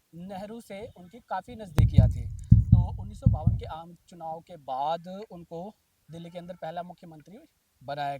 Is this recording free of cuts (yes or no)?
no